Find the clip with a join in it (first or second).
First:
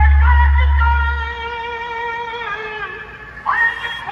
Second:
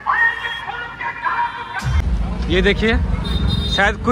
second